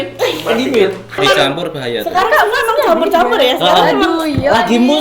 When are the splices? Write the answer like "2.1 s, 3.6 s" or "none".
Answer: 1.2 s